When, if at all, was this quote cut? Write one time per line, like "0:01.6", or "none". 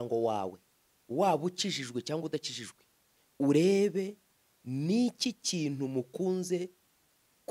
none